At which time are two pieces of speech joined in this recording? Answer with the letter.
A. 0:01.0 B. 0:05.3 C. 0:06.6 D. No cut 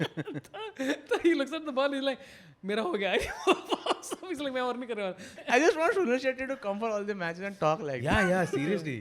B